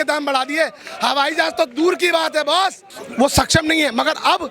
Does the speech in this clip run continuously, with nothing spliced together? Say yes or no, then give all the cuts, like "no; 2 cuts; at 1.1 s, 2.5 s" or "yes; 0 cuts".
no; 1 cut; at 3.0 s